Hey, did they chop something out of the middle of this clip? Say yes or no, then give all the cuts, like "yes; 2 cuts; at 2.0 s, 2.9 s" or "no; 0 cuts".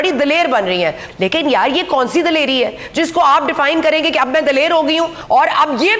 yes; 2 cuts; at 1.0 s, 5.2 s